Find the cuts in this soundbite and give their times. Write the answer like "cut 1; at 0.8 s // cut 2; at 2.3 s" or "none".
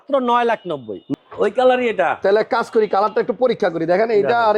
cut 1; at 0.9 s